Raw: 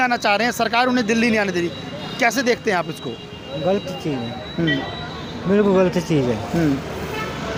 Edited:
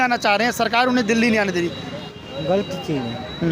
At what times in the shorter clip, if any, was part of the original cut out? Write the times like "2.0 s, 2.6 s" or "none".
2.0 s